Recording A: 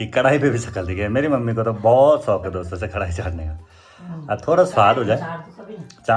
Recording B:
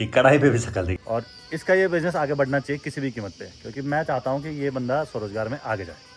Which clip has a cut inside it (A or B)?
B